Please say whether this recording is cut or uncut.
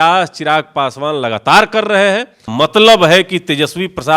cut